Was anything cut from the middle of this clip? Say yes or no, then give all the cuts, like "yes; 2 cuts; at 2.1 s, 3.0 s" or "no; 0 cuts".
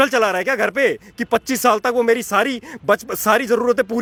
no; 0 cuts